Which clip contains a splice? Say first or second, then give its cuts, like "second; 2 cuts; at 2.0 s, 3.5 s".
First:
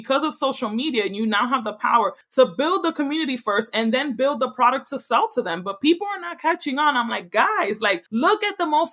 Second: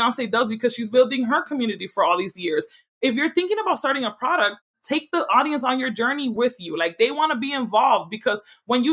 first; 2 cuts; at 2.2 s, 8.0 s